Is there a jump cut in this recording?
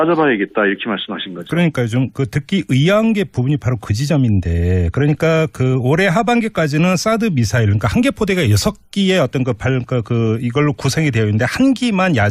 no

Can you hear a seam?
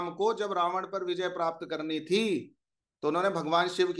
no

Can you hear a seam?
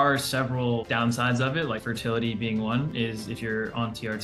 no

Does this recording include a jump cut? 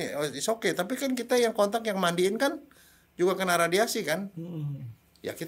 no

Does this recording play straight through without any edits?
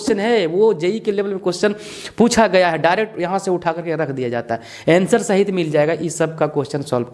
yes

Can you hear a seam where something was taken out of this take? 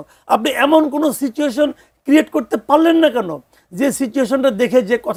no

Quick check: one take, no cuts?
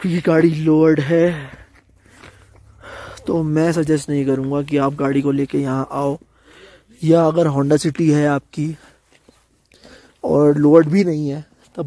yes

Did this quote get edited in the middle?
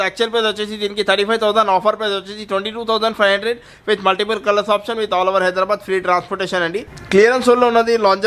yes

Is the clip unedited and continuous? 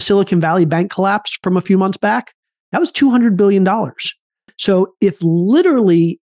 no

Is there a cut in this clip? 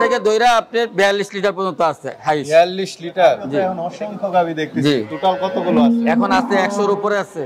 yes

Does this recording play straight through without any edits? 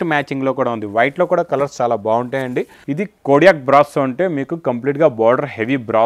no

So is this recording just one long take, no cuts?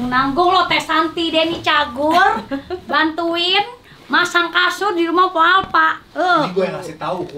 yes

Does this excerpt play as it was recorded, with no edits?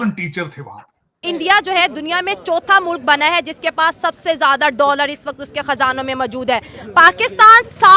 no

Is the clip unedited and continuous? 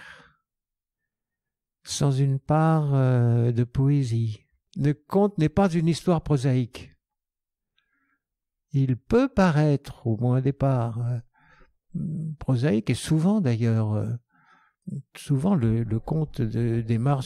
no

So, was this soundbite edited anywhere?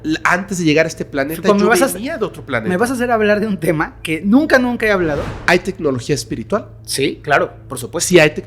yes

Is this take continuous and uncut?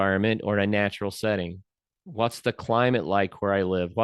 yes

